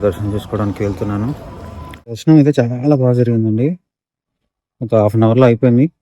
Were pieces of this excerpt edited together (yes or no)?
yes